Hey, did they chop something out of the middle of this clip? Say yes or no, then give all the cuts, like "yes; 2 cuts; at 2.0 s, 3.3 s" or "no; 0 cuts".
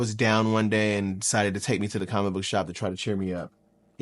no; 0 cuts